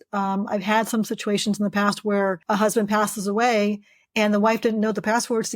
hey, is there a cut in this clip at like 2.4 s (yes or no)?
yes